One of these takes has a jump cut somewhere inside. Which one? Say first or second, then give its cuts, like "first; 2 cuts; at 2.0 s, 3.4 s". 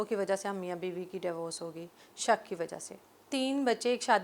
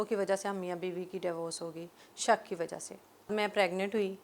second; 1 cut; at 3.3 s